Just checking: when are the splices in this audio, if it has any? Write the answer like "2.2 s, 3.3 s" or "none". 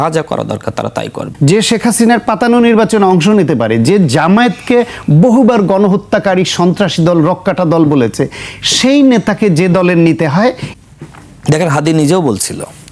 1.2 s, 10.7 s